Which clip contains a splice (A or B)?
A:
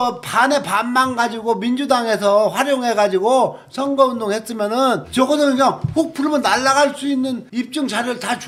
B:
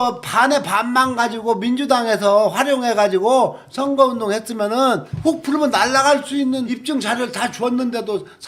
B